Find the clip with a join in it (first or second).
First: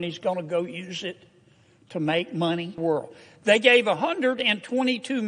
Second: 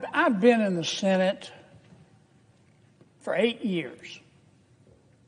first